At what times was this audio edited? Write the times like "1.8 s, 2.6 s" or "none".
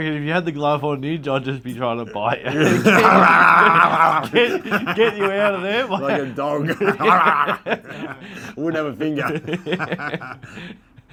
none